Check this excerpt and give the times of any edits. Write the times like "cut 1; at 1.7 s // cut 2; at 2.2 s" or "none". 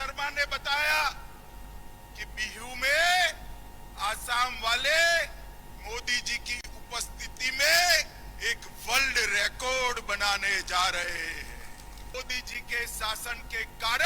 cut 1; at 12.1 s